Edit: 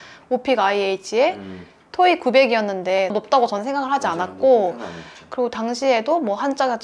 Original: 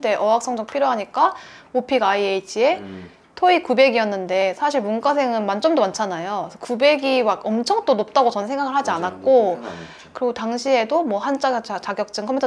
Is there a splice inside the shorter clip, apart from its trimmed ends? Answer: yes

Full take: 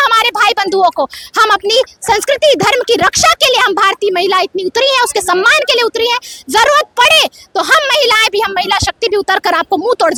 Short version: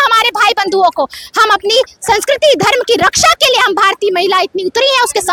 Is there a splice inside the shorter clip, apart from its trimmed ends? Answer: no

